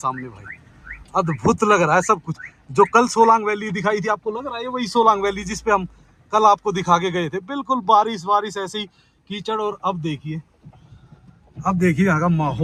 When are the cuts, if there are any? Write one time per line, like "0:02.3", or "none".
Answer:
none